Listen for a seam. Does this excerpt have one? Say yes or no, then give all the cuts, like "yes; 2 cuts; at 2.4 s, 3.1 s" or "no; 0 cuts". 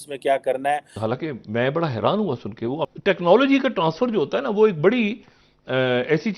yes; 2 cuts; at 1.0 s, 2.7 s